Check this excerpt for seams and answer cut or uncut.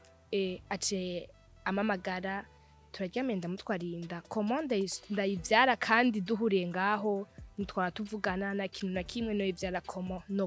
uncut